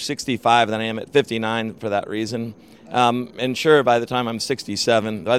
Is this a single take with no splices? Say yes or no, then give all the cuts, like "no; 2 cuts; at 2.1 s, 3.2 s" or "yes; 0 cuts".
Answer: yes; 0 cuts